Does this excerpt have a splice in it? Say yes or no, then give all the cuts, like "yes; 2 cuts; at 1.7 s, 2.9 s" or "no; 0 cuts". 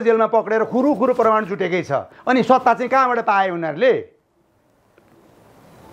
no; 0 cuts